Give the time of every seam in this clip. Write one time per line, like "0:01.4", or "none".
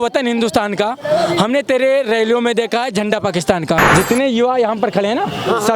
0:03.9